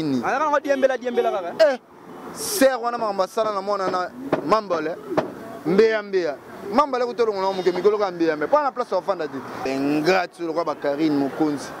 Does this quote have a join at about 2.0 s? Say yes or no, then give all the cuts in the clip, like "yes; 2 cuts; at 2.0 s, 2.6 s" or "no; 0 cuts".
no; 1 cut; at 9.7 s